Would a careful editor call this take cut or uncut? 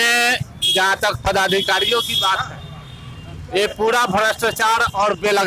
uncut